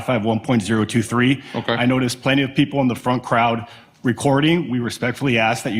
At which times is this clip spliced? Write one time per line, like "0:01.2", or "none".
none